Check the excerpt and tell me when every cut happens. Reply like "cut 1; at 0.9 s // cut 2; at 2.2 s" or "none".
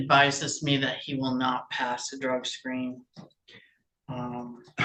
none